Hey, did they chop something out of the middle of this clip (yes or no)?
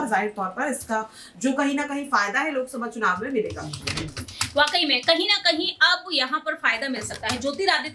no